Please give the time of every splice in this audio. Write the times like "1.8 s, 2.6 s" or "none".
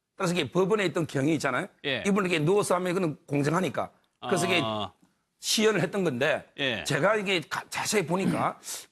1.8 s